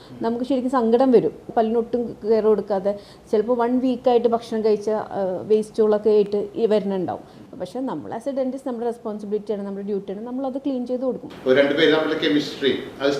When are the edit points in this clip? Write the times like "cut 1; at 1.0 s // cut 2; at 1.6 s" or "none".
cut 1; at 1.5 s // cut 2; at 11.3 s